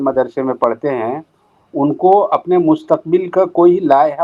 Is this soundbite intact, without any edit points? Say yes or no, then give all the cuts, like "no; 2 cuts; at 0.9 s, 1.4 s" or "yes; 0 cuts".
yes; 0 cuts